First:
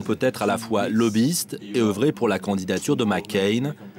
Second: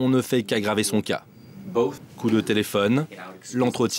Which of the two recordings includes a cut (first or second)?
second